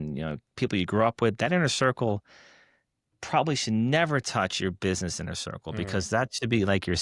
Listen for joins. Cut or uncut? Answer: uncut